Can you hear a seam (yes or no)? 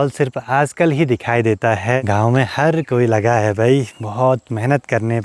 yes